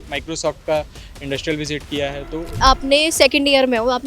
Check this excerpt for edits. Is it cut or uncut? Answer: cut